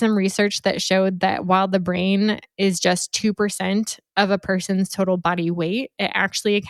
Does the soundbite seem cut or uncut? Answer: uncut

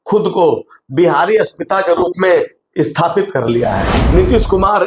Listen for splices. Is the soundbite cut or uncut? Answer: cut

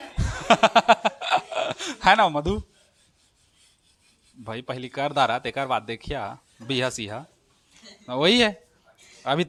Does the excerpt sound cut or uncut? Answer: uncut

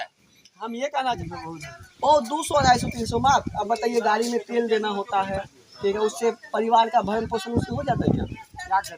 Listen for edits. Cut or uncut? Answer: cut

